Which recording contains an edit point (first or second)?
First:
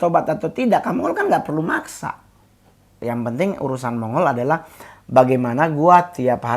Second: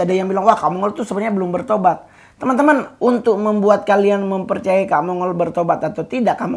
first